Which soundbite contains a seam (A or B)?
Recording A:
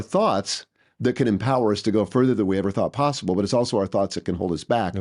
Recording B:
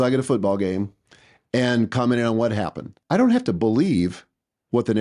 B